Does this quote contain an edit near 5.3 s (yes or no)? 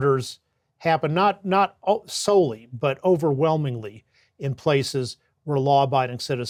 no